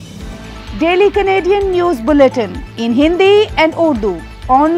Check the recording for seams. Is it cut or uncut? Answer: uncut